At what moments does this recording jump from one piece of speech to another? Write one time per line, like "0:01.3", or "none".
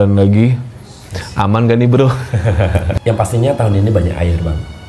0:02.9